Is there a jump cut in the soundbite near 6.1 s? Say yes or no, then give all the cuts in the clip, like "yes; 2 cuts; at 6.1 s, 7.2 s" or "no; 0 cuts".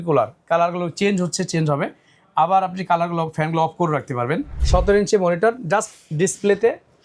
no; 1 cut; at 4.5 s